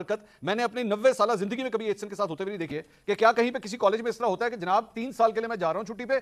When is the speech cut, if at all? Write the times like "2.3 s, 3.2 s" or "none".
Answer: 2.7 s